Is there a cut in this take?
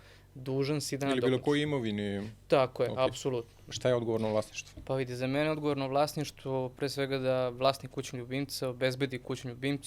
yes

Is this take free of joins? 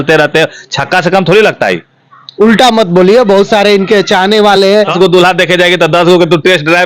no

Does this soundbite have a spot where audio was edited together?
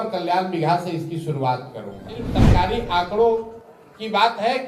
yes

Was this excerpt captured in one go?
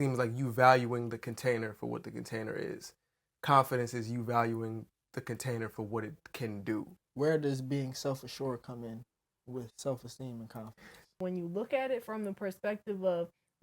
no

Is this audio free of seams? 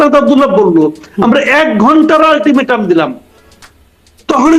yes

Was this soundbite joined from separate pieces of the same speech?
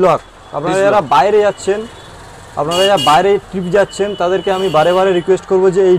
no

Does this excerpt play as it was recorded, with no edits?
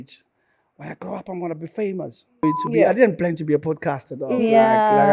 no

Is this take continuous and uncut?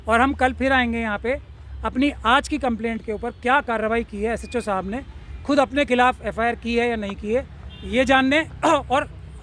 yes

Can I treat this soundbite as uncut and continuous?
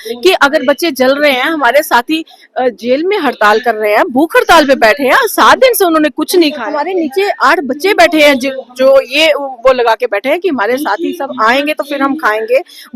no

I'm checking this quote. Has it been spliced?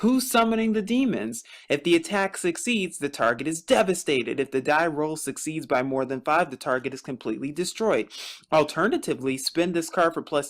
yes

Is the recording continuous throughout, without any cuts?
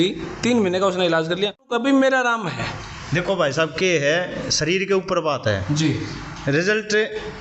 no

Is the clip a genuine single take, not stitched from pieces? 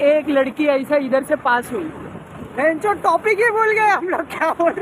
yes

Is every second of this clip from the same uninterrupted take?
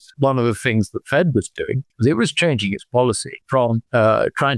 no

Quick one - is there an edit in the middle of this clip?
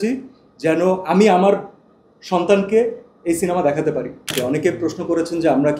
yes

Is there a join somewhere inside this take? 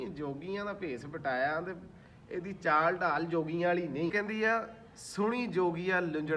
yes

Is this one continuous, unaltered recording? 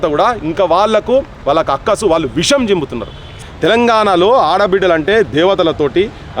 no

